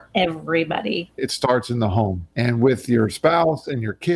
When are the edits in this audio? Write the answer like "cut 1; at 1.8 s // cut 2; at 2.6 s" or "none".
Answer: cut 1; at 1.2 s // cut 2; at 2.2 s